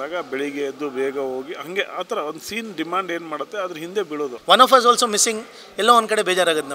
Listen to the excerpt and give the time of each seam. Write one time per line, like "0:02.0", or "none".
0:04.4